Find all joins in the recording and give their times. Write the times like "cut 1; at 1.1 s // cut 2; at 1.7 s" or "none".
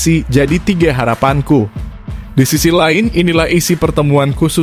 none

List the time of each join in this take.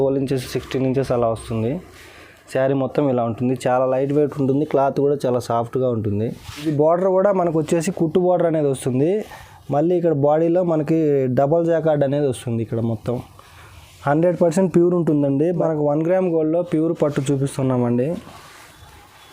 cut 1; at 6.6 s // cut 2; at 15.6 s

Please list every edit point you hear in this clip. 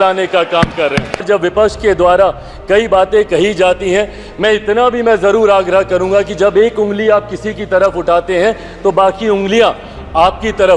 cut 1; at 1.2 s

